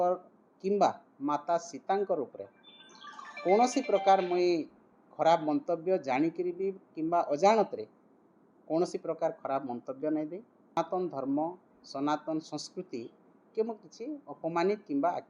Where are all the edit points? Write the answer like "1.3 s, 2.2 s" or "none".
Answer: 10.8 s

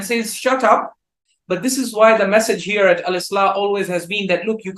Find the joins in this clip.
1.3 s

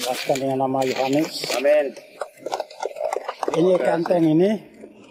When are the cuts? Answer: none

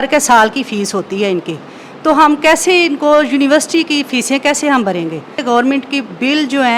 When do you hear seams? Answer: 5.4 s

